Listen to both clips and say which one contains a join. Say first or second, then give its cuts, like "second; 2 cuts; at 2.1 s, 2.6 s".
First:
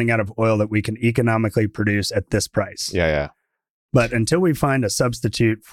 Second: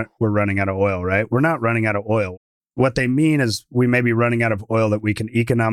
second; 1 cut; at 2.3 s